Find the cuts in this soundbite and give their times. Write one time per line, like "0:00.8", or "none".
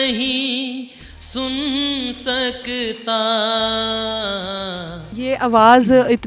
0:05.1